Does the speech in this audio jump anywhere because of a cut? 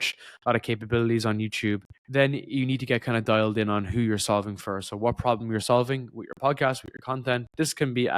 yes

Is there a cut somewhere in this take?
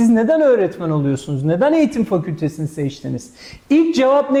no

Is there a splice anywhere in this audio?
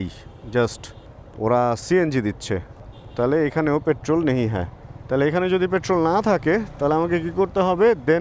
no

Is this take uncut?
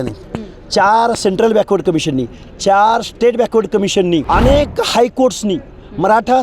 no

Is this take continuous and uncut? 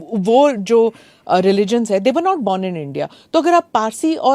yes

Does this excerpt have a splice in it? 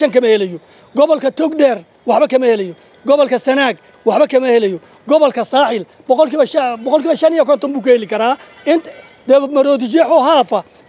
no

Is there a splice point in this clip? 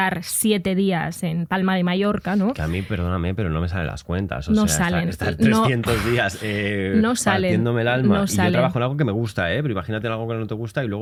no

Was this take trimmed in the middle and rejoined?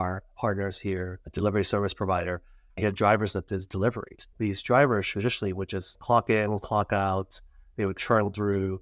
yes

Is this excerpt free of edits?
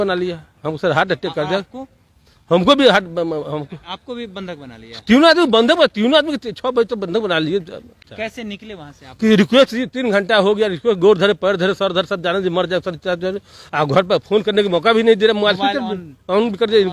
no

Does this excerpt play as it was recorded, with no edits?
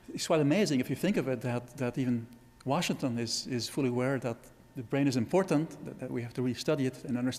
yes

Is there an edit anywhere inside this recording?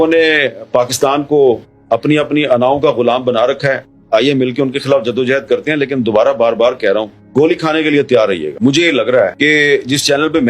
no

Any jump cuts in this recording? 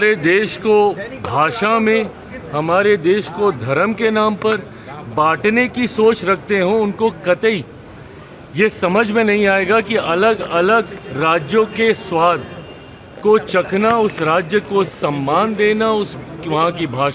no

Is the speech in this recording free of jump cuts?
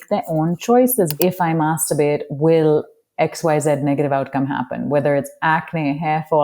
no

